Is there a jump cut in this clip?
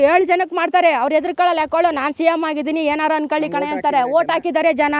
no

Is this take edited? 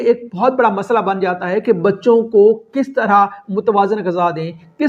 no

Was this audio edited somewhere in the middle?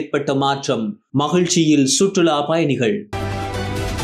no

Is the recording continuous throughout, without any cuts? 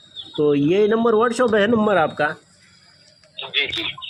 yes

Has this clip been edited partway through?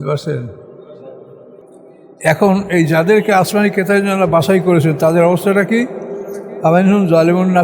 yes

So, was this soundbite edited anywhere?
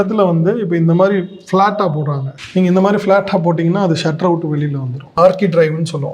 yes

